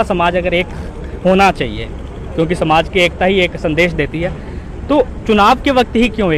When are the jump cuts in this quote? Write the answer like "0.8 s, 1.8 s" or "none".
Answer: none